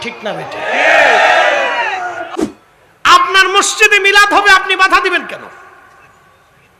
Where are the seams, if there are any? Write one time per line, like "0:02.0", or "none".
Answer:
0:02.2